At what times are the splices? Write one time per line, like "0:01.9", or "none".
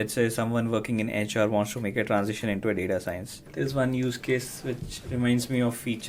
0:03.3